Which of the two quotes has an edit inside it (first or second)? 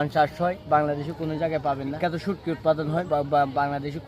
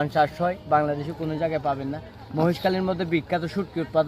first